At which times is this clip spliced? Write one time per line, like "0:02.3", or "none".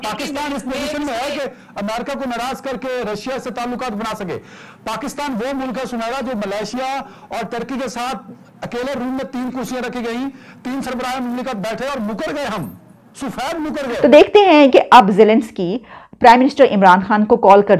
0:13.8